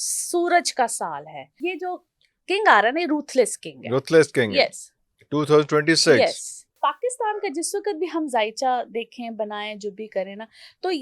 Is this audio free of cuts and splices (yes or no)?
no